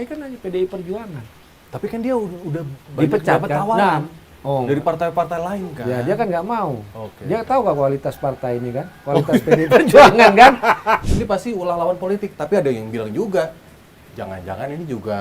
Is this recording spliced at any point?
yes; 1 cut; at 11.0 s

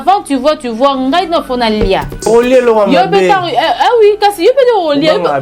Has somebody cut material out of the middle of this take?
yes; 1 cut; at 2.3 s

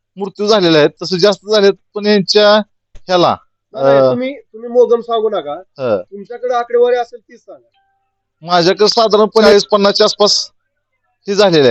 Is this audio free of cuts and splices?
no; 1 cut; at 9.5 s

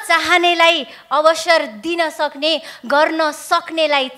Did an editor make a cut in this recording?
no; 0 cuts

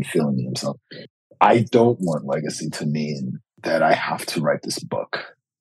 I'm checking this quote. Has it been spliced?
yes; 2 cuts; at 1.0 s, 3.6 s

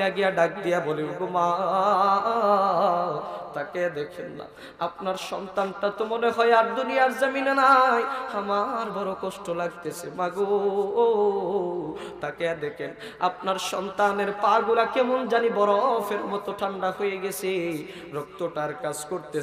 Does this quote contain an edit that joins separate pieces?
no; 0 cuts

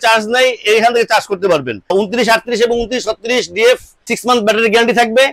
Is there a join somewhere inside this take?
yes; 2 cuts; at 1.9 s, 4.1 s

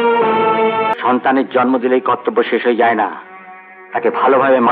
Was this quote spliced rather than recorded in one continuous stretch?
yes; 1 cut; at 0.9 s

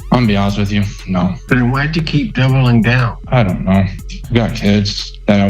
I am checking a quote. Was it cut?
yes; 2 cuts; at 3.1 s, 4.2 s

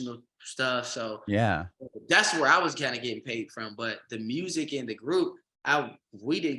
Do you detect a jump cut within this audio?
no; 0 cuts

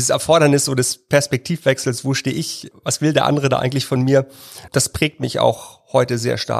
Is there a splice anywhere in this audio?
yes; 2 cuts; at 2.7 s, 4.6 s

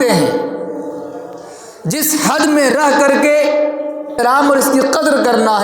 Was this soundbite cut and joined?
yes; 1 cut; at 4.2 s

